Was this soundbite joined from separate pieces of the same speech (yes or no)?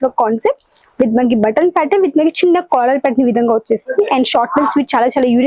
no